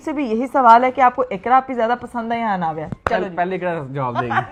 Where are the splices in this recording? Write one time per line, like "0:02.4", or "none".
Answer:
none